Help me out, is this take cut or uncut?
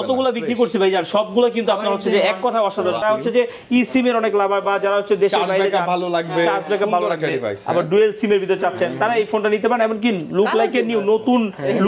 cut